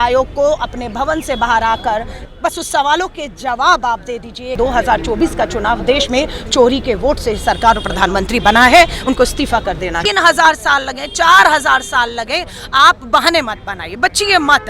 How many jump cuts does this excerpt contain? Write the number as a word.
three